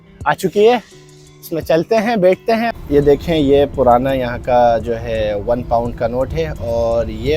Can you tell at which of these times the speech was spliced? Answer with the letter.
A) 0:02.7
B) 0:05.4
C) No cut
A